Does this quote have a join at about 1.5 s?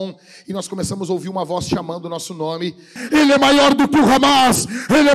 no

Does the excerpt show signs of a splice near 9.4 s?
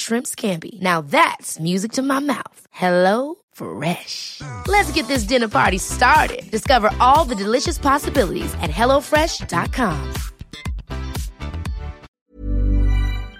no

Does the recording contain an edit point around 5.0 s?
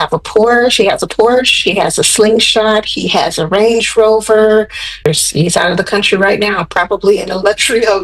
yes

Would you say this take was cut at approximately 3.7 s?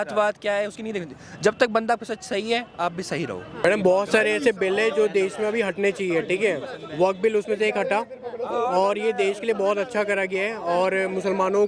yes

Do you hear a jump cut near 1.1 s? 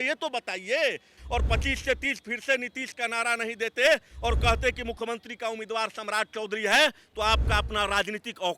yes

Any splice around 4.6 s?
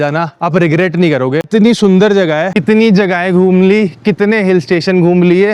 no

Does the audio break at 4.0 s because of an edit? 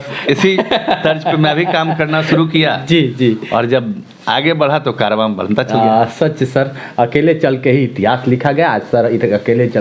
no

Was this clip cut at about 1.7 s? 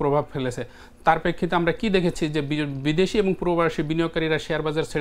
no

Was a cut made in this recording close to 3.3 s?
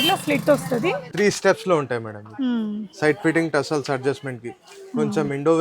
no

